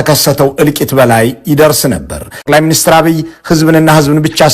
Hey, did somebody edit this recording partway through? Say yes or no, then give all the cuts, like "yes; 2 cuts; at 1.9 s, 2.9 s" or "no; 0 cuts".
yes; 1 cut; at 2.6 s